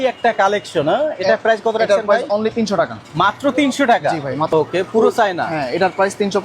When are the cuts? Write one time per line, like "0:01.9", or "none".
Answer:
0:04.5